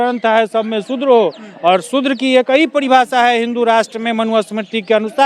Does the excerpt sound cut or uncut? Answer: uncut